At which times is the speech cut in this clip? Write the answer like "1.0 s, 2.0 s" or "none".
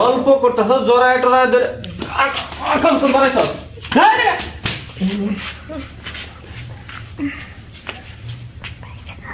4.8 s